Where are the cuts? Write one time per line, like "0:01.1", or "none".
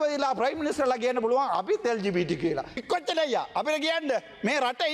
0:02.8